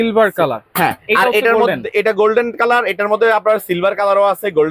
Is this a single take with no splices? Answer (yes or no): yes